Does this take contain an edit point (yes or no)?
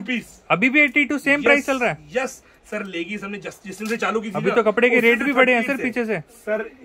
no